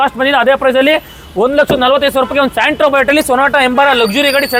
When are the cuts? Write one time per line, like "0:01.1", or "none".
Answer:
none